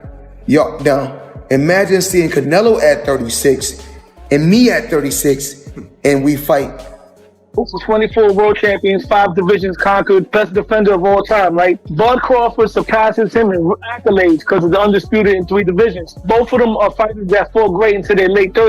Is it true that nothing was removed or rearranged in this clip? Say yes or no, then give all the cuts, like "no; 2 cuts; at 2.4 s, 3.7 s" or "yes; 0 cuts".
no; 1 cut; at 7.6 s